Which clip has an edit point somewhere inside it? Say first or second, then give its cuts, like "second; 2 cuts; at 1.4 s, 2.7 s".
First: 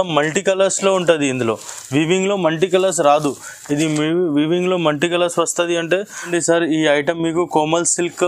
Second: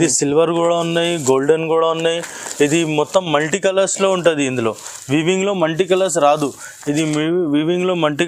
first; 1 cut; at 6.2 s